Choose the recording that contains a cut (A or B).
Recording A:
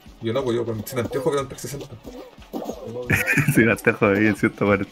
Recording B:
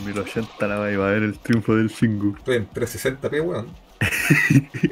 B